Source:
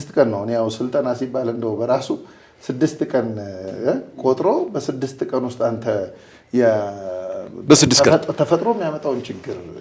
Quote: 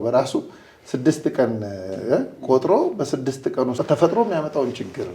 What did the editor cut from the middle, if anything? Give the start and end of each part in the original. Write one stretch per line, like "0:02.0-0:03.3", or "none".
0:05.5-0:08.3